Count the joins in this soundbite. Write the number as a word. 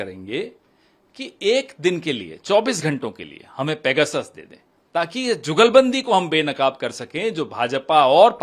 zero